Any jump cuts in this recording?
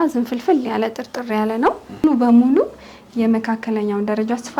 yes; 1 cut; at 2.0 s

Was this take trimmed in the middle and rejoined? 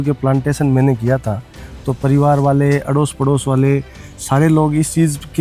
no; 0 cuts

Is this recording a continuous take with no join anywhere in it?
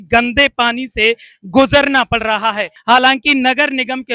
no; 1 cut; at 2.7 s

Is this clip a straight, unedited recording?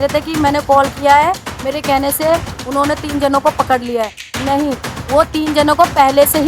yes; 0 cuts

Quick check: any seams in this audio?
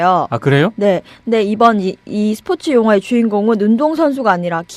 yes; 1 cut; at 1.3 s

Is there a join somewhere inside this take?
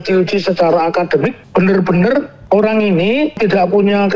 yes; 3 cuts; at 1.4 s, 2.4 s, 3.4 s

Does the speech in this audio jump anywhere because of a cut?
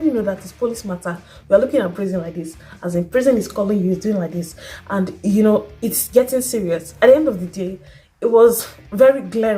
yes; 1 cut; at 6.9 s

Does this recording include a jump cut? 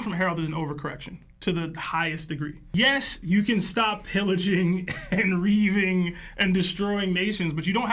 no; 0 cuts

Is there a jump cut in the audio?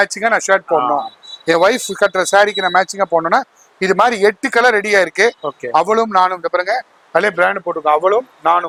no; 0 cuts

